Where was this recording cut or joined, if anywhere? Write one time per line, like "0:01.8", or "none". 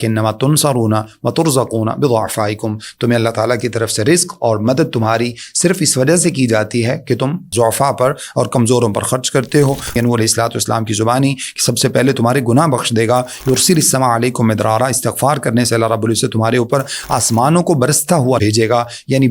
0:07.5
0:10.0
0:18.4